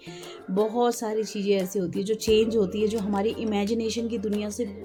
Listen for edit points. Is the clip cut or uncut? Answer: uncut